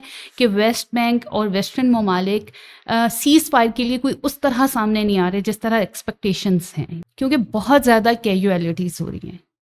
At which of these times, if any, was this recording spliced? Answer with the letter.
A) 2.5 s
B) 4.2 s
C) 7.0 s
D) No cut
D